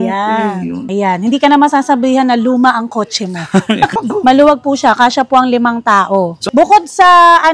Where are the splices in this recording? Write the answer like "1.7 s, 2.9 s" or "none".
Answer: 0.8 s, 3.9 s, 6.4 s